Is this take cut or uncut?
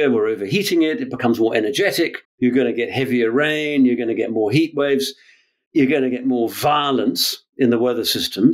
uncut